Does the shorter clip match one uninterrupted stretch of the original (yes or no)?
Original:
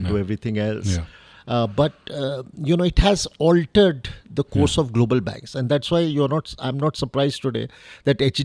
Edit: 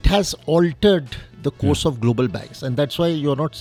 yes